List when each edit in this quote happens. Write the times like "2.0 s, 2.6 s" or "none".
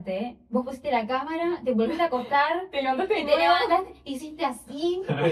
none